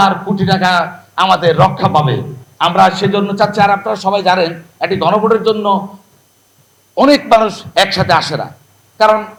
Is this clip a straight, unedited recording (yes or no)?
yes